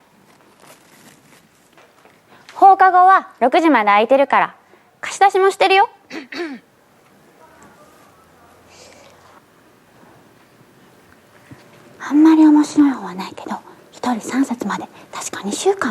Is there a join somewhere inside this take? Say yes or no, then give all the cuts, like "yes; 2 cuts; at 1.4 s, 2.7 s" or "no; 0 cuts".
yes; 2 cuts; at 9.4 s, 10.9 s